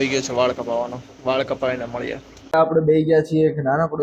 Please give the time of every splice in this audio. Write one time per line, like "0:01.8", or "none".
0:02.5